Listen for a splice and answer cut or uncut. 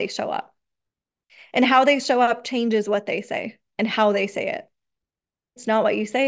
uncut